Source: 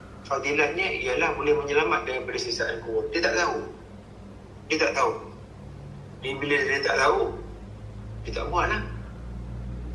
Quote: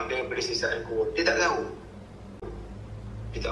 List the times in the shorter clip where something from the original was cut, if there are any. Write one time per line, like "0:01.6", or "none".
0:02.5